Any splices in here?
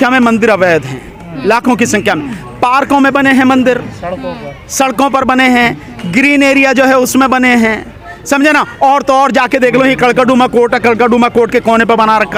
no; 0 cuts

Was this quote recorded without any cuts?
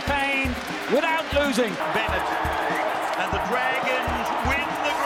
yes; 0 cuts

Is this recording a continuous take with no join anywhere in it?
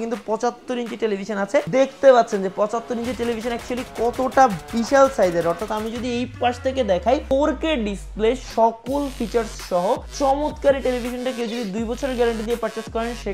yes; 0 cuts

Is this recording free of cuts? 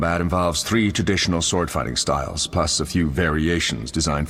yes; 0 cuts

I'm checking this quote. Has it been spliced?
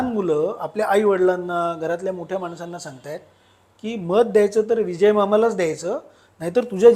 no; 0 cuts

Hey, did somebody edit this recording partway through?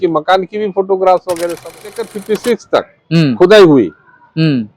yes; 1 cut; at 2.2 s

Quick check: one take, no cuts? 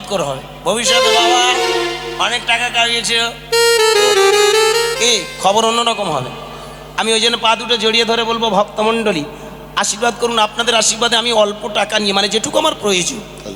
yes; 0 cuts

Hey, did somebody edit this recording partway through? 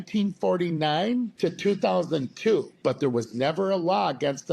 yes; 2 cuts; at 1.3 s, 2.7 s

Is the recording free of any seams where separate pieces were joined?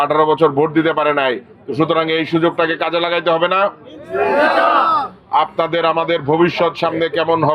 yes; 0 cuts

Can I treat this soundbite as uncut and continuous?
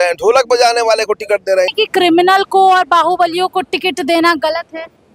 no; 1 cut; at 1.7 s

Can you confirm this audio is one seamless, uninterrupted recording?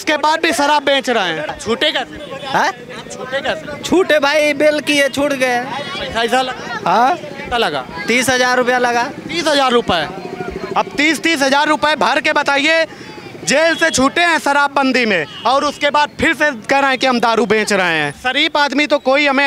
no; 2 cuts; at 1.5 s, 18.2 s

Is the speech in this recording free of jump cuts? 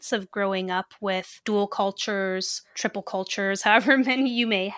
no; 2 cuts; at 1.3 s, 2.6 s

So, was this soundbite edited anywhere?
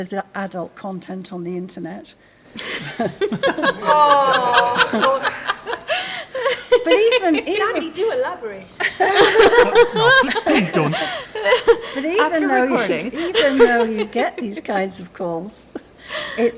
no; 0 cuts

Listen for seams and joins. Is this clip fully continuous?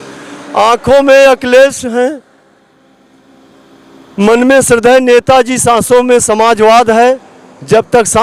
yes; 0 cuts

